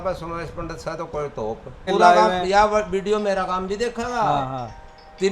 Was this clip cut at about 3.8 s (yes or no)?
no